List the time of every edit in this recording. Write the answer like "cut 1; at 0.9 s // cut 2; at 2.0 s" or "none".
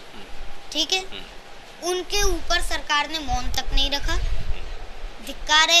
none